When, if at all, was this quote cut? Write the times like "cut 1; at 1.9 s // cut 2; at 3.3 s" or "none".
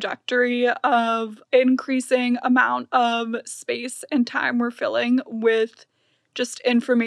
cut 1; at 1.4 s

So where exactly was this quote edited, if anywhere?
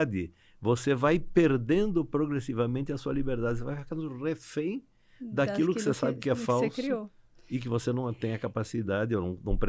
none

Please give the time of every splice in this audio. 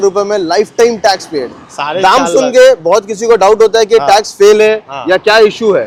none

